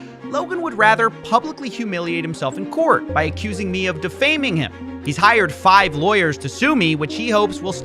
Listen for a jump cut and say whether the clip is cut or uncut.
cut